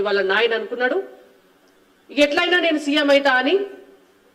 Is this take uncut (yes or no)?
yes